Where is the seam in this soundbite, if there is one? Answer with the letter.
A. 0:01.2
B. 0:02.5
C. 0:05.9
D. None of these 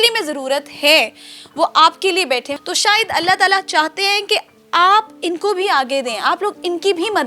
B